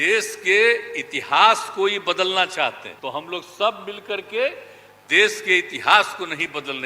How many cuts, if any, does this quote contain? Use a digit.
1